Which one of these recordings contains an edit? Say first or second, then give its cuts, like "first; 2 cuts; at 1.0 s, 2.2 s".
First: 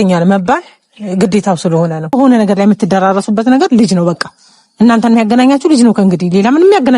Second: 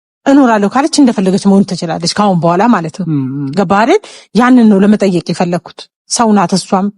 first; 1 cut; at 2.1 s